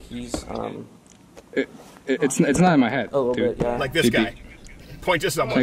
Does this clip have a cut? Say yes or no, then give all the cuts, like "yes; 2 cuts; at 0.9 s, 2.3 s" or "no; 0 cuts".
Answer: no; 0 cuts